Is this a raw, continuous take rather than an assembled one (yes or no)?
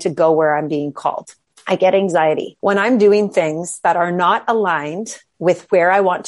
no